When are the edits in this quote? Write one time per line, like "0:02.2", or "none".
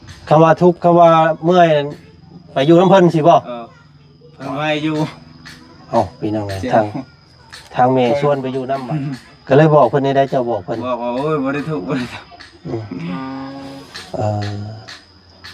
0:08.9